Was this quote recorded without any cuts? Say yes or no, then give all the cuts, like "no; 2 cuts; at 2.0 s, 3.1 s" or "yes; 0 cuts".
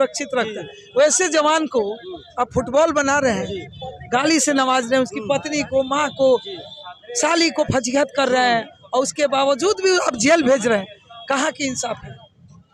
yes; 0 cuts